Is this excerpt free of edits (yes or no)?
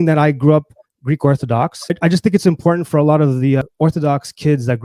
no